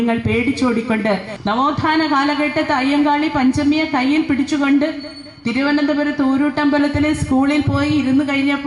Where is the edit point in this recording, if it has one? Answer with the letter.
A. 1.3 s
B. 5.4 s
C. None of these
A